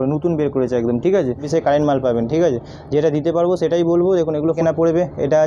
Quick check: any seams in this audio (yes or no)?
yes